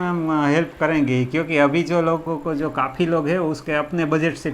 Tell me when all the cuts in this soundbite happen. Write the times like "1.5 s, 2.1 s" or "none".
2.2 s, 3.6 s